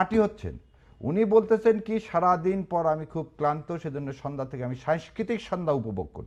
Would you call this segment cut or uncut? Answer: uncut